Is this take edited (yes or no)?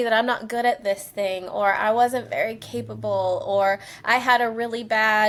no